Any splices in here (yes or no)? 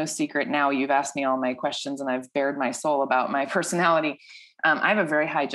no